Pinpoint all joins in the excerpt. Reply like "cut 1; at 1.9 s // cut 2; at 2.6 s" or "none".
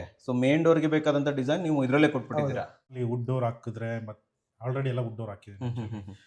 cut 1; at 3.0 s